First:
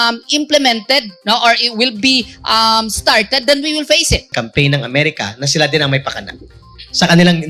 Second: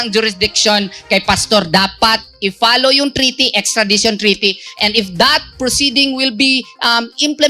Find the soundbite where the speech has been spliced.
first; 1 cut; at 4.3 s

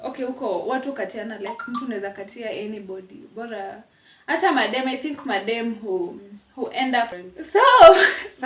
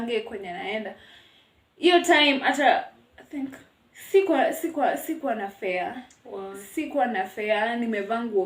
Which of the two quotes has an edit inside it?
first; 1 cut; at 7.2 s

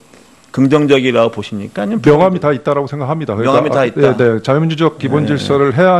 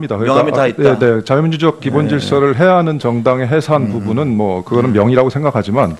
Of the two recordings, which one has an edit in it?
first; 1 cut; at 2.1 s

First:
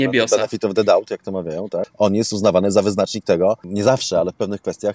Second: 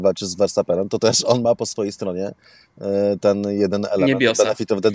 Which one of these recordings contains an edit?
first; 2 cuts; at 1.9 s, 3.7 s

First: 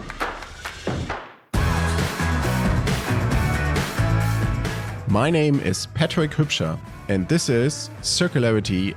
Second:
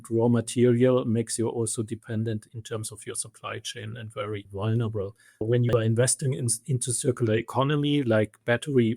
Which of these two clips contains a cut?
second; 3 cuts; at 2.5 s, 4.5 s, 5.4 s

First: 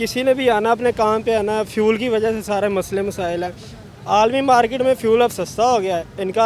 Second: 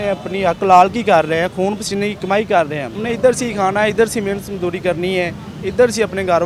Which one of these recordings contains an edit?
second; 1 cut; at 2.9 s

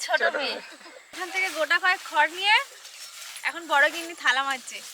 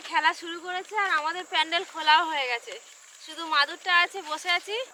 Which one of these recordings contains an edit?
first; 1 cut; at 1.2 s

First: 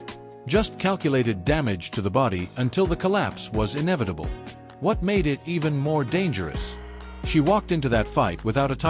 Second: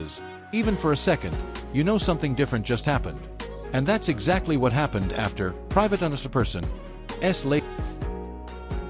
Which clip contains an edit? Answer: second; 1 cut; at 7.6 s

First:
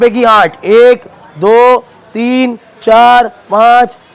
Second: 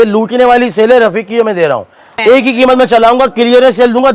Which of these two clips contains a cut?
second; 1 cut; at 2.0 s

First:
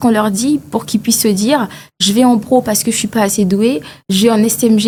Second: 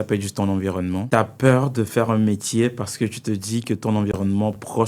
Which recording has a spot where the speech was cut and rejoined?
second; 1 cut; at 1.0 s

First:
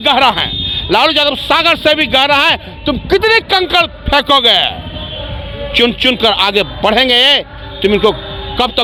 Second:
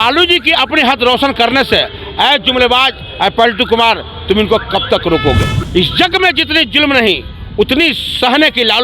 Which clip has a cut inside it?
second; 1 cut; at 5.6 s

